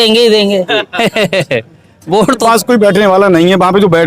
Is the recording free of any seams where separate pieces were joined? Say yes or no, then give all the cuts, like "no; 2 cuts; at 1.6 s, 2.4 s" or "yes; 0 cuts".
no; 1 cut; at 2.4 s